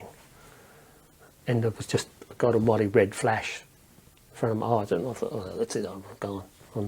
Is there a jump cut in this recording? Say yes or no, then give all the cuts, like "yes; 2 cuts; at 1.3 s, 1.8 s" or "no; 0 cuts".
no; 0 cuts